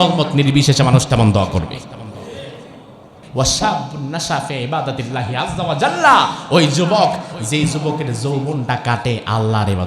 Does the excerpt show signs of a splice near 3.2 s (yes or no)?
yes